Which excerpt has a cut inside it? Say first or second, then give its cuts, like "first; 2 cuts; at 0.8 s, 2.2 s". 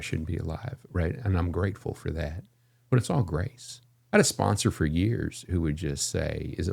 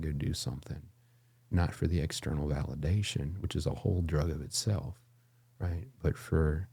first; 1 cut; at 3.9 s